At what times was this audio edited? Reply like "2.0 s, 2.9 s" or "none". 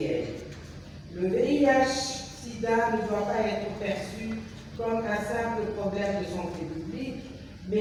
none